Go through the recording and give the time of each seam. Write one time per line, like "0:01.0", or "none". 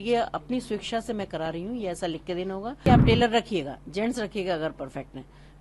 0:02.8